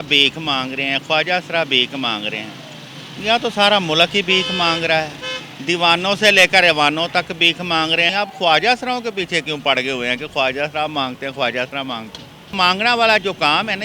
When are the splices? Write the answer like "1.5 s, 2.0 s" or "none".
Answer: 8.1 s, 12.5 s